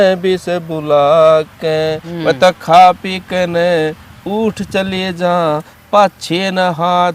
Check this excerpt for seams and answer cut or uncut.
uncut